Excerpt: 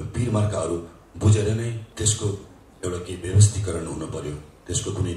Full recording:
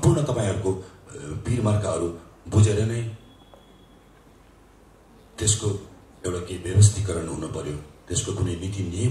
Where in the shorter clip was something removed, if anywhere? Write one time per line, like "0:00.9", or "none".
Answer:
0:01.8